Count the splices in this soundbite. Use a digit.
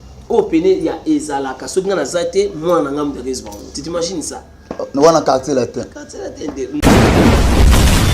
1